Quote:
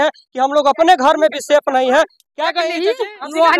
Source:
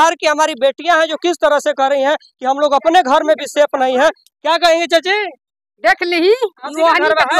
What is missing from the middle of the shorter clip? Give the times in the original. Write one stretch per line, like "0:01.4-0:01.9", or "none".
0:04.6-0:06.0